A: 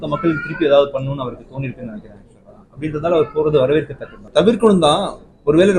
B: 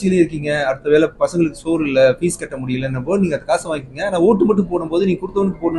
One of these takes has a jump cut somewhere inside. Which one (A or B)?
A